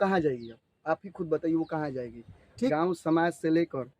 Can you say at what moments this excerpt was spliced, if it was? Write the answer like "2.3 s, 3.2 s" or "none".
2.7 s